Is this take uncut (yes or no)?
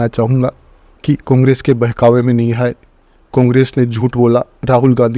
yes